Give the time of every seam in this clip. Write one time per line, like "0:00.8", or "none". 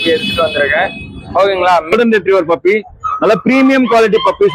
0:01.9